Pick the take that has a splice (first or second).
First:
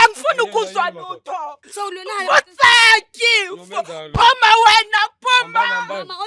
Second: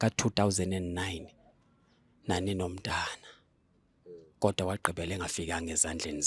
first